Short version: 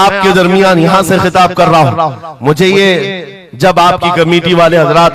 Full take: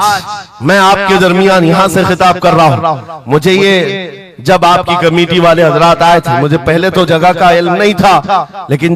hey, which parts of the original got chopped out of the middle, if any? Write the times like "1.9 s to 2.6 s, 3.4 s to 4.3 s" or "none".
none